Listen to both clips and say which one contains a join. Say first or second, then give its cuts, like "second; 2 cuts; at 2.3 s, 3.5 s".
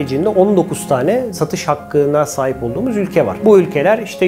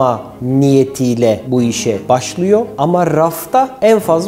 first; 1 cut; at 3.3 s